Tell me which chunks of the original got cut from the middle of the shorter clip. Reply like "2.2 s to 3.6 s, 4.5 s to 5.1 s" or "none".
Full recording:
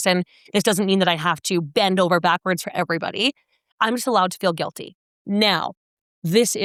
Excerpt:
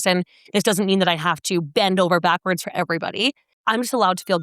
3.5 s to 3.6 s

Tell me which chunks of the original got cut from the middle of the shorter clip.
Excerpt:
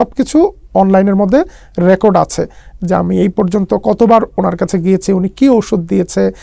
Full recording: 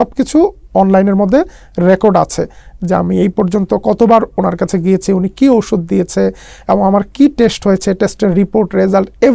none

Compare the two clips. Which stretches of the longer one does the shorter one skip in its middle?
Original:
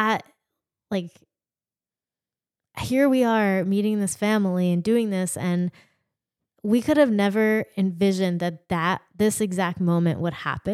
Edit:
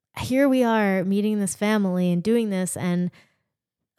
none

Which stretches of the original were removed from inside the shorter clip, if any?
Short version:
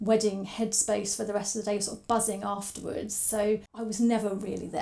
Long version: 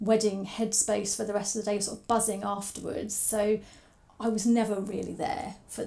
3.8 s to 4.2 s

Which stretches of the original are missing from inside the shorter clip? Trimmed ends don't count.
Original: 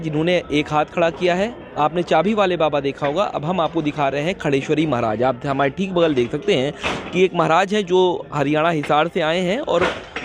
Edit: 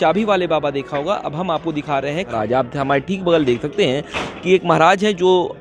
4.4 s to 5.0 s

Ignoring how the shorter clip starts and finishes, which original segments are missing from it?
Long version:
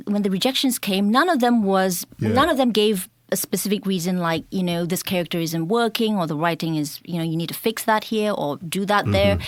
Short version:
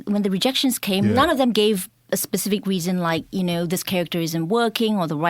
1.1 s to 2.3 s

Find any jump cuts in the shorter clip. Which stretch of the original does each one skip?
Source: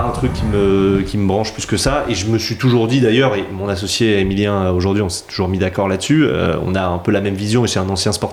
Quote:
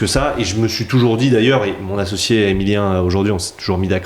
none

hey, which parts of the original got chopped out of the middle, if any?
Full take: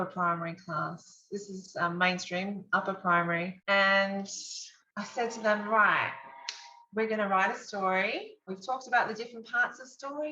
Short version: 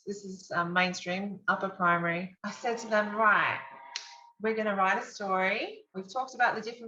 3.5 s to 4.8 s

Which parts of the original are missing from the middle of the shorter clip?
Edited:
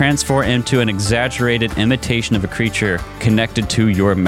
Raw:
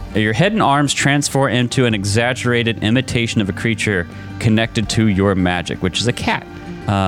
4.1 s to 4.3 s

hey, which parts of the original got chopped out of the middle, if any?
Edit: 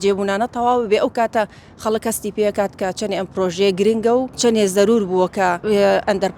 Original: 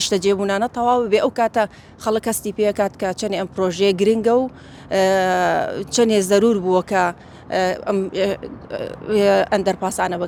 4.5 s to 5.9 s, 7.1 s to 9.0 s

